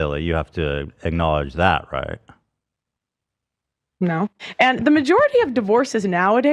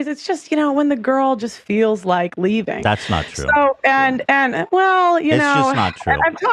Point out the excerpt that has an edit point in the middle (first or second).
first